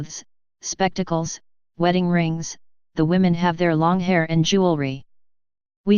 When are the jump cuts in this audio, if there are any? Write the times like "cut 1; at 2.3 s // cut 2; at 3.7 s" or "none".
none